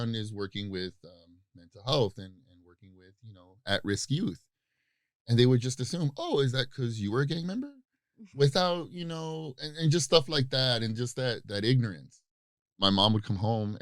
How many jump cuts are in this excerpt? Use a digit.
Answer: 1